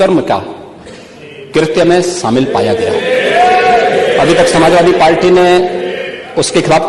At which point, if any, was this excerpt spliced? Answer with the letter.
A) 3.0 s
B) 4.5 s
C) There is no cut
C